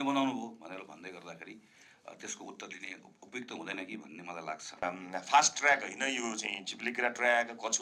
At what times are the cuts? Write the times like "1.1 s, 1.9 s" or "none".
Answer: 4.8 s